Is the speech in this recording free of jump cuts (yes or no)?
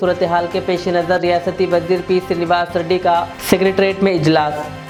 yes